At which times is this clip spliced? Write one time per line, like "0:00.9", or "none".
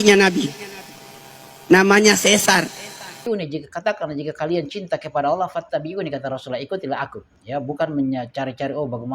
0:03.3